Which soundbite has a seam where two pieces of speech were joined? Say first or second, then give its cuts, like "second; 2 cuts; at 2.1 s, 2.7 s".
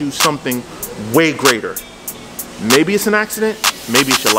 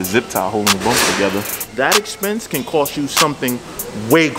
second; 1 cut; at 1.6 s